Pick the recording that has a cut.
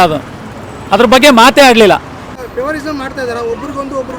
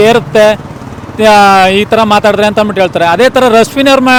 first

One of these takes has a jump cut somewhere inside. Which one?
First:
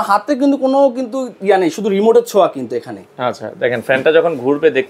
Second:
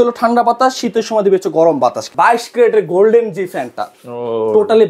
second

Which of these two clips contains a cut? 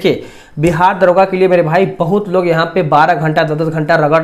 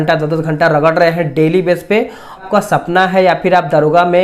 second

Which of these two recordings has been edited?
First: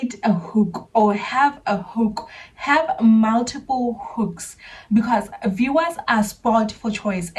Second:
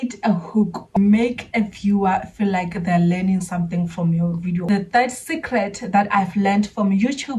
second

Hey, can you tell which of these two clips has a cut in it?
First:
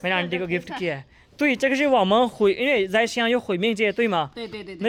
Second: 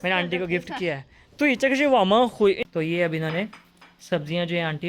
second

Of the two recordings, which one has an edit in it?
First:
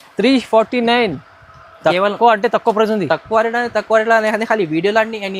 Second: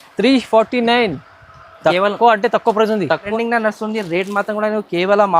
second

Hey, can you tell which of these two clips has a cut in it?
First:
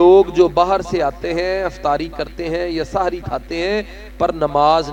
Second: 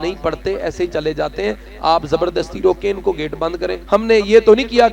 second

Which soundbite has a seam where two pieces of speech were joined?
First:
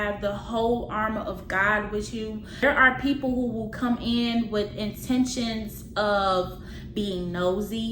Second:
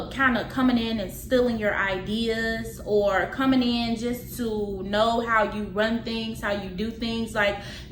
first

